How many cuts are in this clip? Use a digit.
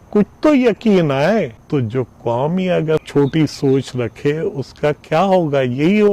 2